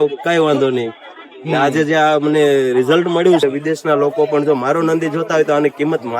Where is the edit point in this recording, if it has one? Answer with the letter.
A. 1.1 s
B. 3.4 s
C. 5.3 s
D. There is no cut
B